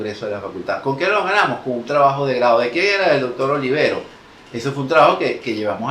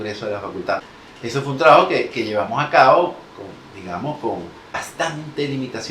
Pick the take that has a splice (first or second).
second